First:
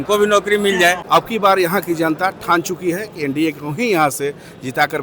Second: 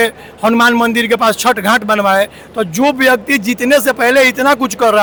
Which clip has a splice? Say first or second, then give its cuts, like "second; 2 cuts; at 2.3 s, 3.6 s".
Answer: first; 1 cut; at 1.0 s